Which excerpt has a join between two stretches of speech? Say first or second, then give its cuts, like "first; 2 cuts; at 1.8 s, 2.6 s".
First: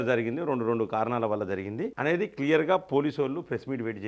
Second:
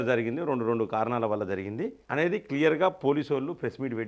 first; 1 cut; at 1.9 s